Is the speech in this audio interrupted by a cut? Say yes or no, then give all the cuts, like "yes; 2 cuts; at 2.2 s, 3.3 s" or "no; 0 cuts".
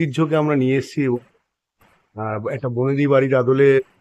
no; 0 cuts